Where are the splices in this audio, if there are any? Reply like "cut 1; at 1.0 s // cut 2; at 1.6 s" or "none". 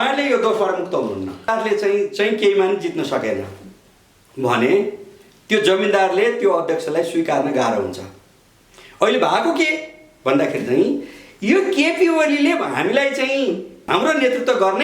cut 1; at 1.5 s // cut 2; at 13.8 s